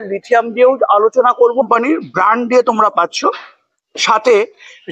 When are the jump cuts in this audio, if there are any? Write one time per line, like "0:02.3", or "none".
0:01.6